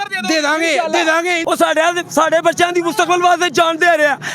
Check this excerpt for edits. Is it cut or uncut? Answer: cut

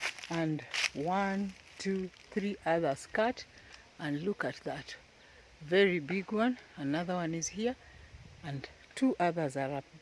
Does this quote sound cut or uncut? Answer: uncut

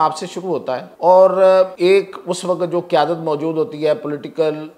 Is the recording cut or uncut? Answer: cut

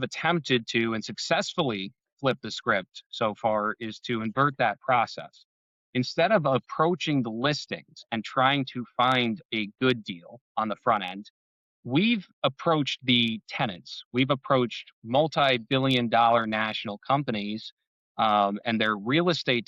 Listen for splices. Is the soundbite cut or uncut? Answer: uncut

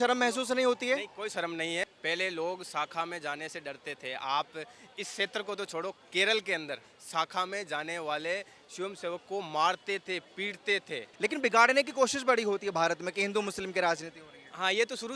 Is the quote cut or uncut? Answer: cut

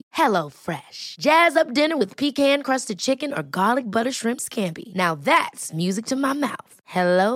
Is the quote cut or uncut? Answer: uncut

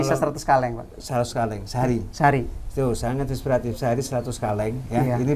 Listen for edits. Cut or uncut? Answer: uncut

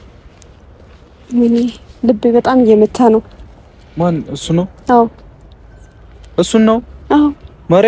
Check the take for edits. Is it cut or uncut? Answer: uncut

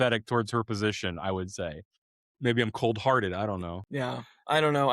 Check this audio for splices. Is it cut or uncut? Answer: cut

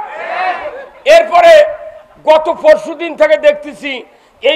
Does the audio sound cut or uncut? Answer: uncut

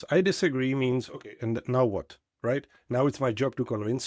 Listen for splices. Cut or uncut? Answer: uncut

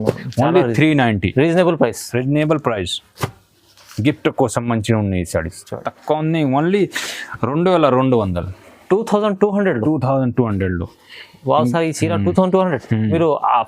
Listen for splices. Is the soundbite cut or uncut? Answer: cut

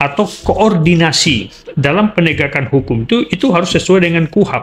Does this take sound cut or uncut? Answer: uncut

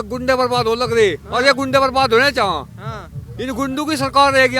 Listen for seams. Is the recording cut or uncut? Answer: uncut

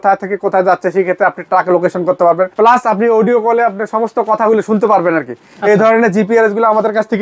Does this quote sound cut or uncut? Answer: uncut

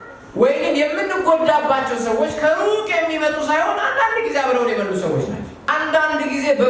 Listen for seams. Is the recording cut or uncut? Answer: cut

